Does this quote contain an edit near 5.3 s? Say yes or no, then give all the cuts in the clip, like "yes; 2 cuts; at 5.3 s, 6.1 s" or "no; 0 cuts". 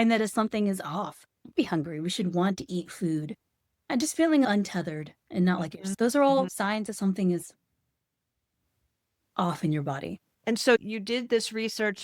no; 1 cut; at 3.9 s